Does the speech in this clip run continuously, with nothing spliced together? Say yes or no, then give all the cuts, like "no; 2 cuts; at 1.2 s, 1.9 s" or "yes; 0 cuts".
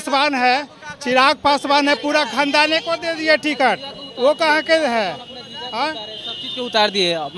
yes; 0 cuts